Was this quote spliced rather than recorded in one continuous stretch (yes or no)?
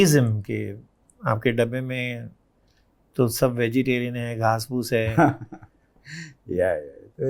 no